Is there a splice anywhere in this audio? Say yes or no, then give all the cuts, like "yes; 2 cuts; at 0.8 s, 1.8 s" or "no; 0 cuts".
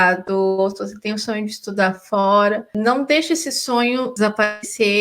yes; 2 cuts; at 2.7 s, 4.1 s